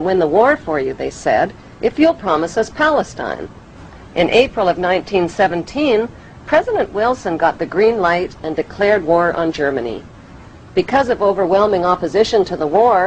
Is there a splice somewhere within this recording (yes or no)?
yes